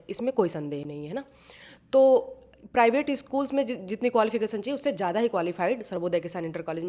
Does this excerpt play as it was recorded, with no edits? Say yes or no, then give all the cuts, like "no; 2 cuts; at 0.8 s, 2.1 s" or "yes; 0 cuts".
yes; 0 cuts